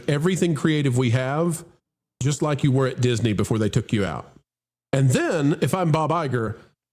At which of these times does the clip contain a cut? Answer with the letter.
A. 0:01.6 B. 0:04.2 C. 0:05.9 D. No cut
D